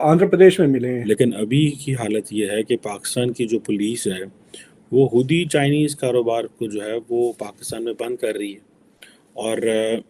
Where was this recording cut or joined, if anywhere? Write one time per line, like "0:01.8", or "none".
0:01.0